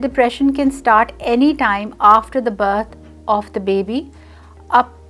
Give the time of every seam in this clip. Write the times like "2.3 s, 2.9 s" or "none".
none